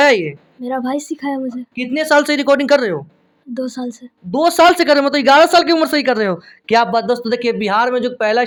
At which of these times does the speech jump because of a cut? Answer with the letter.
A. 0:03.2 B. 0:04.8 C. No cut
C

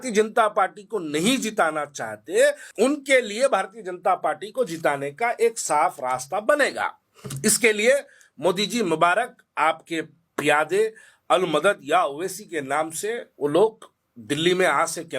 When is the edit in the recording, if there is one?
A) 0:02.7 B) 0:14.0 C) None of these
A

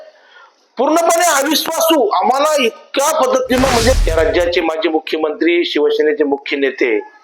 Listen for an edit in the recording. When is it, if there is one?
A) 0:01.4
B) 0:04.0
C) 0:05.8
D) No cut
B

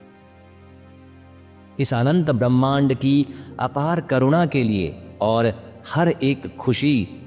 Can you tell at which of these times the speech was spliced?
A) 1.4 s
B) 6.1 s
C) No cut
A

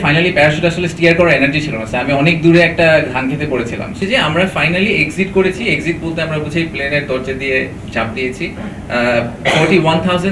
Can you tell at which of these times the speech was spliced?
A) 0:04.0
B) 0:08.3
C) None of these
A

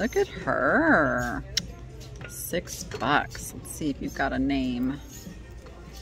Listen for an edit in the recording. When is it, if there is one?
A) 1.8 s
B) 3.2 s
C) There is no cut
C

